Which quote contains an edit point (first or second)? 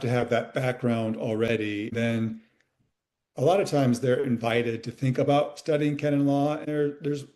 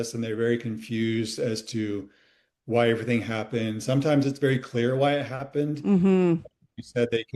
first